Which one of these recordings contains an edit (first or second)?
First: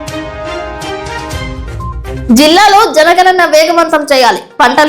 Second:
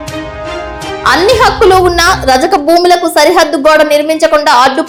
first